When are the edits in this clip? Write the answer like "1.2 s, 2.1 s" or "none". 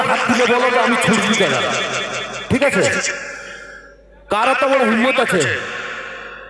none

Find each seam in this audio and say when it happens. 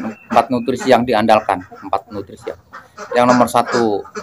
2.7 s

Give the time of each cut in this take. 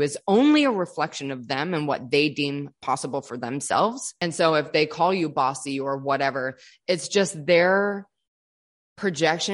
4.1 s

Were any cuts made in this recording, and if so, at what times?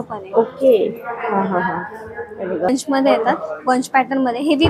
2.7 s

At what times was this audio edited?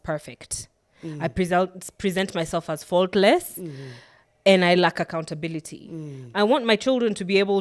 none

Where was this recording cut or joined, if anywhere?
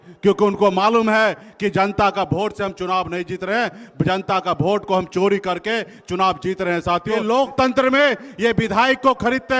7.2 s

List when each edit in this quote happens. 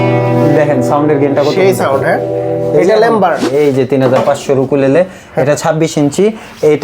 3.5 s

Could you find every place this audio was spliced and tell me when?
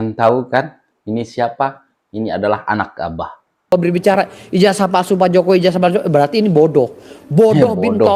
3.7 s

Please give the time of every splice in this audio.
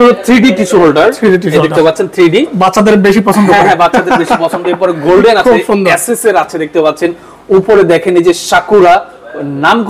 none

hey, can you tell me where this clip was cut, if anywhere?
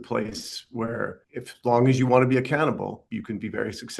1.2 s, 3.0 s

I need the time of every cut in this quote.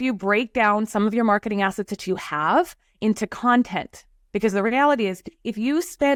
none

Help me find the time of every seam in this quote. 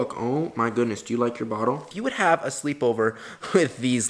1.9 s

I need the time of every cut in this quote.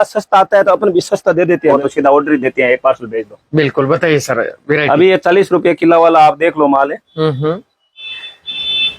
1.7 s

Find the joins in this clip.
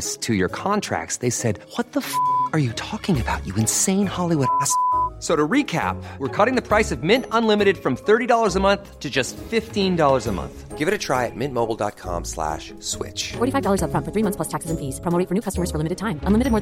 none

